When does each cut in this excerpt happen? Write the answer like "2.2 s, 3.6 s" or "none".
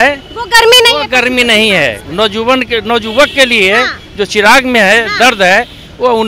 none